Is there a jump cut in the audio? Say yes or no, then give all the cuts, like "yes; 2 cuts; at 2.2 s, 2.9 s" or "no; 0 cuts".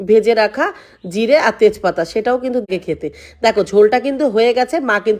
yes; 1 cut; at 2.7 s